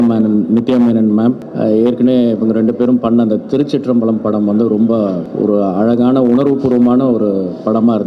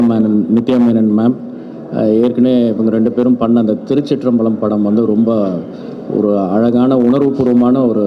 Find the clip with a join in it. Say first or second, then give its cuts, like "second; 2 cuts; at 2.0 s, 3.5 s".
first; 2 cuts; at 1.5 s, 5.2 s